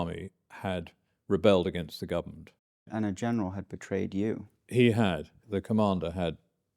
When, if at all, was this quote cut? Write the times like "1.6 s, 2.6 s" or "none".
2.8 s, 5.4 s